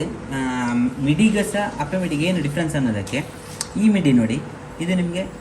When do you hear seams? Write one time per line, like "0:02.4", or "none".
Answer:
none